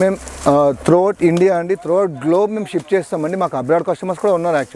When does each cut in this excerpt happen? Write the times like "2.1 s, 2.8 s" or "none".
none